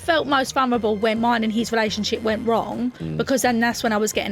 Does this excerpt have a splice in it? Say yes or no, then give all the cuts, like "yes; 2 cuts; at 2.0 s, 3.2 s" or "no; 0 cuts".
yes; 1 cut; at 1.1 s